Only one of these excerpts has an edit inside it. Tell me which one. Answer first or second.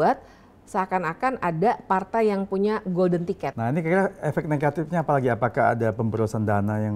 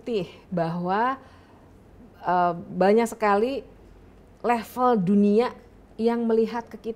first